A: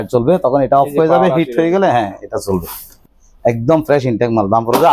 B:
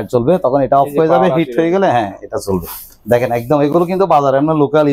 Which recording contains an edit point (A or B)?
A